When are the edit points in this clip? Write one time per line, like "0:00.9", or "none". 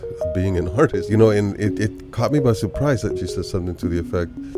0:03.2

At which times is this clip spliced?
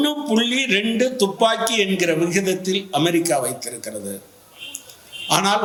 none

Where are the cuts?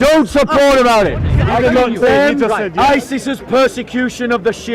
0:01.3

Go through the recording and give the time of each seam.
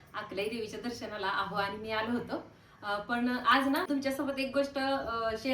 0:03.9

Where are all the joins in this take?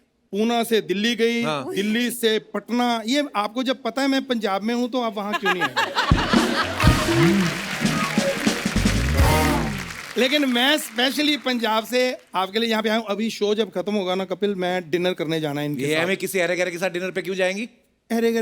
none

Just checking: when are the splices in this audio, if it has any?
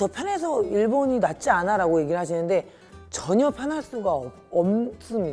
none

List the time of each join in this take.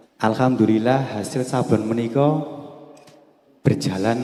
none

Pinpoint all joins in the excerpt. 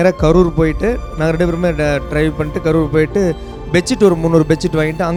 none

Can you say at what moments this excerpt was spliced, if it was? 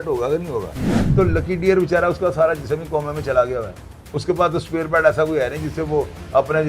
0:00.9

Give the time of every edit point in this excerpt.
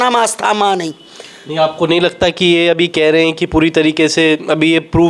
none

